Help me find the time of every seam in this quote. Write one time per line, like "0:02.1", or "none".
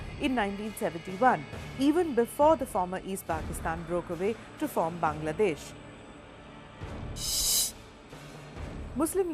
0:02.7

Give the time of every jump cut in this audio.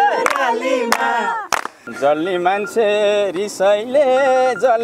0:01.8

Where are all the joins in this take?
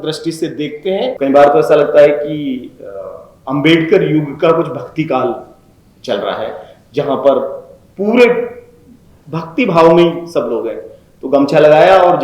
0:01.2

